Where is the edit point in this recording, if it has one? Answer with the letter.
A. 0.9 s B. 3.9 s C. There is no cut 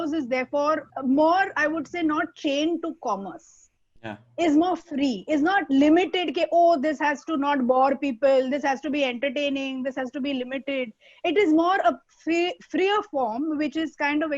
A